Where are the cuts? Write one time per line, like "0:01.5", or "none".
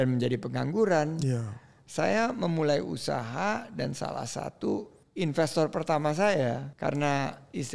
0:05.0
0:06.7